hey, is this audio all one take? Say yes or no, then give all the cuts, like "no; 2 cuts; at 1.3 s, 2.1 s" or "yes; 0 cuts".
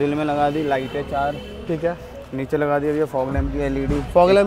yes; 0 cuts